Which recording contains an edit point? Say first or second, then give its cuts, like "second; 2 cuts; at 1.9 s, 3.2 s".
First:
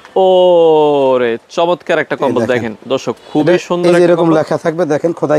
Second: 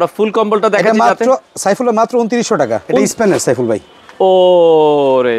second; 1 cut; at 2.9 s